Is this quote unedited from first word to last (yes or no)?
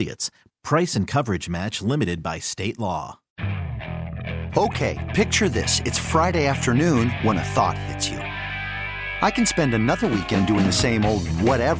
no